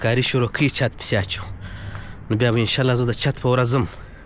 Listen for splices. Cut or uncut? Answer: uncut